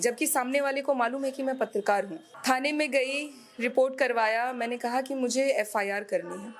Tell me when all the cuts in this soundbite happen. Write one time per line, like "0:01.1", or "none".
0:02.2